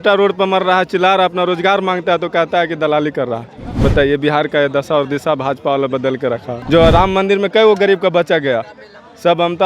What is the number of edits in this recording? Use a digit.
1